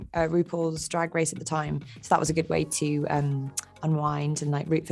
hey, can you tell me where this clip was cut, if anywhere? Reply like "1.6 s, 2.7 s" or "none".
none